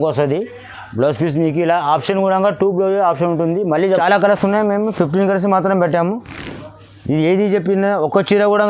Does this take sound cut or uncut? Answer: cut